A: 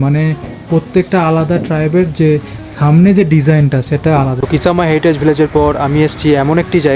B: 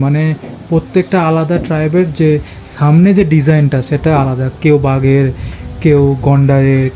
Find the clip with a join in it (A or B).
A